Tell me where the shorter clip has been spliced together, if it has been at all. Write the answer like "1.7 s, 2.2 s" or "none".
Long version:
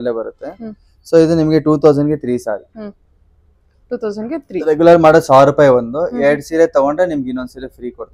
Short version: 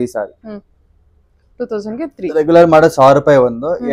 none